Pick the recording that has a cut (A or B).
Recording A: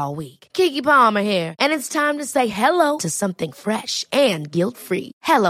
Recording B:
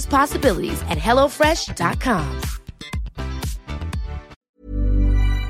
B